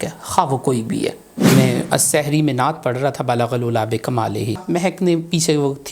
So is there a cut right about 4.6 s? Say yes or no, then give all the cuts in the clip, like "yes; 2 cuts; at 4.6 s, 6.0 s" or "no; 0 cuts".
yes; 2 cuts; at 1.3 s, 4.6 s